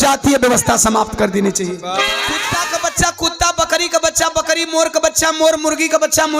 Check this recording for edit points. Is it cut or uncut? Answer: cut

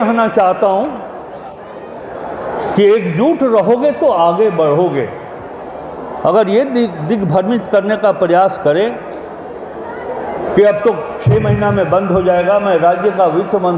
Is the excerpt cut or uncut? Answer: uncut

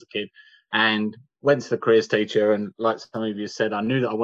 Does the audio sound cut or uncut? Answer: uncut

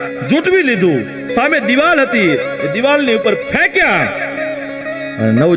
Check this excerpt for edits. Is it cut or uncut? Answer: uncut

